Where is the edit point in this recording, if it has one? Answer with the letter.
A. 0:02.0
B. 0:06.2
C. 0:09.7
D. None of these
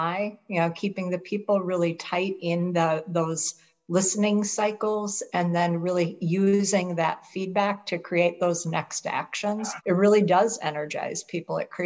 C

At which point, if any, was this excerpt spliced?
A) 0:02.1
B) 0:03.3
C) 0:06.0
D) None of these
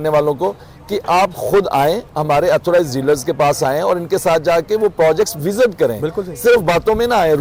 D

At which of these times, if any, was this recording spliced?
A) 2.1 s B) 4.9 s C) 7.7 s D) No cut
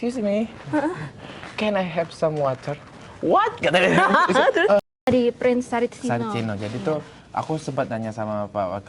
B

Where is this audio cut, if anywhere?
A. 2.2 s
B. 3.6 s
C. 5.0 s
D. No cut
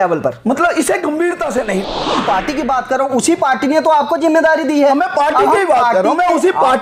A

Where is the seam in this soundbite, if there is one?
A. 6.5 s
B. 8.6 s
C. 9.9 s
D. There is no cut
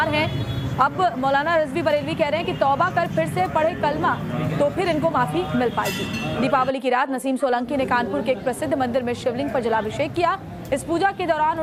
D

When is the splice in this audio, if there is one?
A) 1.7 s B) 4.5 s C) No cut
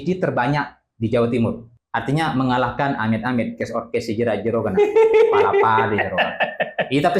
A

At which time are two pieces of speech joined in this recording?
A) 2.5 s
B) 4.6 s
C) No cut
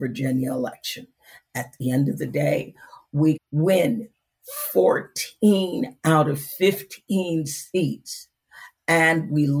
C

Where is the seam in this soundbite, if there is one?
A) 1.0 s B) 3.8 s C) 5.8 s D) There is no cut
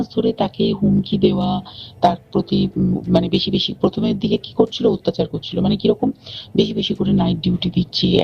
D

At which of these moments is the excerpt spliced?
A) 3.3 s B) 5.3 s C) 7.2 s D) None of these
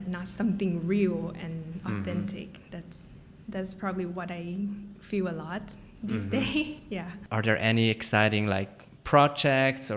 C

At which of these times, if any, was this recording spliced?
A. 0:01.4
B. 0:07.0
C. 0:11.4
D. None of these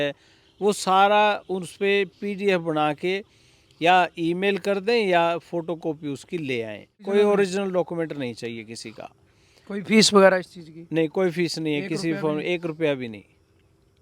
B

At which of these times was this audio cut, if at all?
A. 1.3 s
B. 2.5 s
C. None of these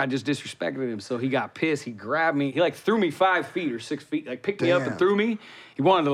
B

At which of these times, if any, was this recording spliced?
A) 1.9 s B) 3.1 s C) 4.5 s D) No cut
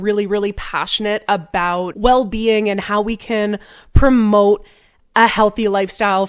A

